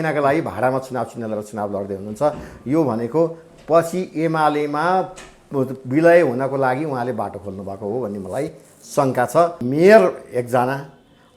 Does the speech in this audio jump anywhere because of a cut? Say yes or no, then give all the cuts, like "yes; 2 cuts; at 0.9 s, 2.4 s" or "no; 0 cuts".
yes; 1 cut; at 9.6 s